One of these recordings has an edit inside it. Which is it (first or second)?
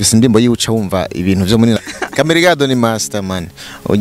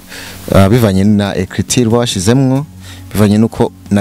first